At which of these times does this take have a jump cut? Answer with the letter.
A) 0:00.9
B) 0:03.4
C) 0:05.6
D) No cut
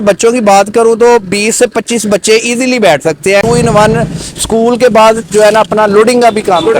B